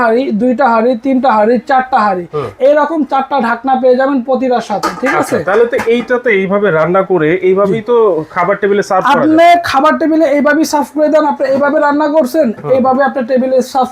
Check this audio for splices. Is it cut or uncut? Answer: uncut